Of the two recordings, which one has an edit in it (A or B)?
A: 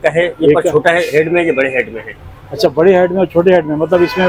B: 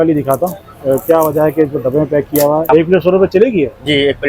B